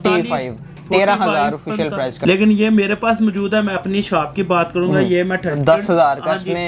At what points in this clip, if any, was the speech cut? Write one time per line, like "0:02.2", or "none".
0:02.1
0:05.6